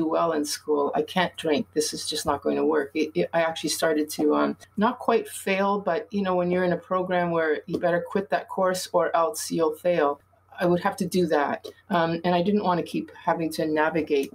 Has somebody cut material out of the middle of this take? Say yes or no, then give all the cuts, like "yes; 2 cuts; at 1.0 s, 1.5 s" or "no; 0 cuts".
no; 0 cuts